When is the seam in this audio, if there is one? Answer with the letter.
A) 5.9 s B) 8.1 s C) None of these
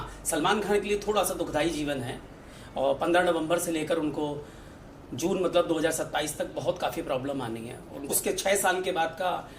B